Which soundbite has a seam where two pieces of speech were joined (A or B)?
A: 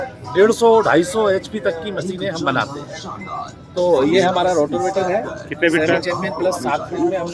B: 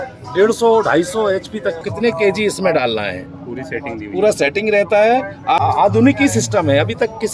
B